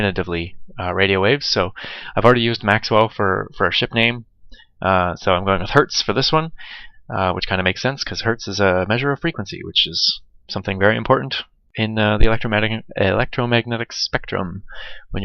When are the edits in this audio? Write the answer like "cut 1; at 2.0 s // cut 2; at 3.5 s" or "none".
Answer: none